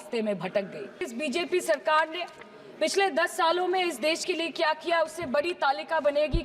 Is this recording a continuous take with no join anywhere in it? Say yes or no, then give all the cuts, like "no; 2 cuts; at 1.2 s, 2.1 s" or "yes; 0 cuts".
no; 1 cut; at 1.1 s